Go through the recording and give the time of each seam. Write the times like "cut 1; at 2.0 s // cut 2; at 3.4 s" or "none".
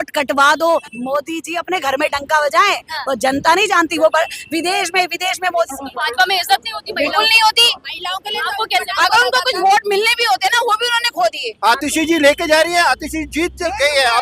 cut 1; at 0.9 s // cut 2; at 5.8 s // cut 3; at 11.5 s